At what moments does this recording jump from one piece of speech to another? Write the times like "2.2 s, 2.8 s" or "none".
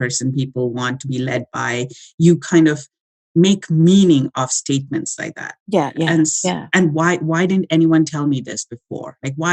none